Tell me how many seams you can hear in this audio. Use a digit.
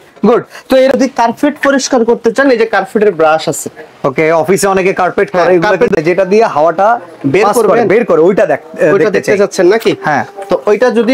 2